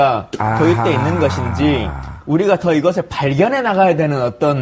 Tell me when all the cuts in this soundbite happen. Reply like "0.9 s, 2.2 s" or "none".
2.8 s